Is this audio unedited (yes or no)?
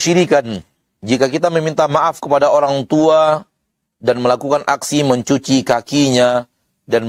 yes